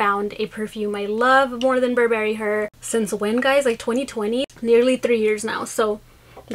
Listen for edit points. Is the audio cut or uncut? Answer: cut